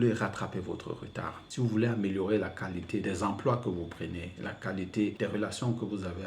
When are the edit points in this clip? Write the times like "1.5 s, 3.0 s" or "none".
1.4 s, 3.0 s, 5.1 s

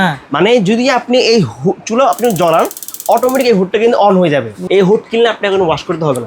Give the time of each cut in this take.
4.5 s

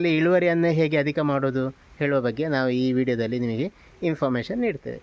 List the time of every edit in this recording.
none

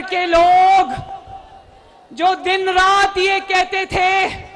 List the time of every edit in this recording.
none

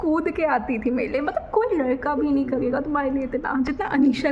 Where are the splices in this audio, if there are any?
none

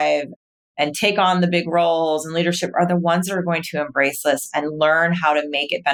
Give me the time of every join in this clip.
none

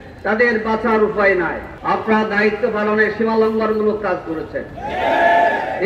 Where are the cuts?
1.7 s

